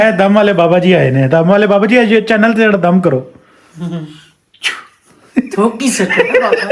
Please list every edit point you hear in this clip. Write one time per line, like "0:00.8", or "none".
none